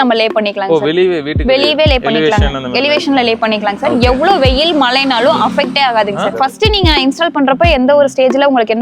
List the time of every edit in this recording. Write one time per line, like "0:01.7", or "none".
0:06.3

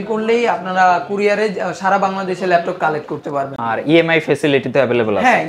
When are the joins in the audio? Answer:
none

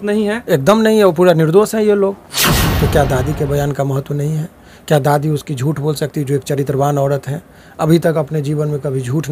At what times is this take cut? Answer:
0:02.5

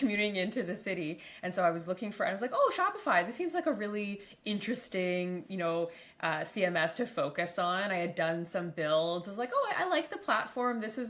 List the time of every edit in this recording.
none

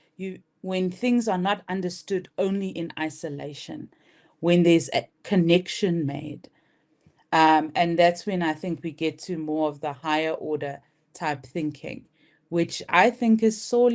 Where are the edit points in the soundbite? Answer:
none

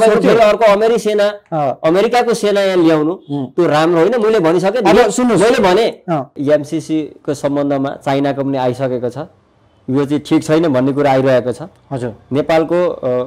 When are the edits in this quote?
0:06.4

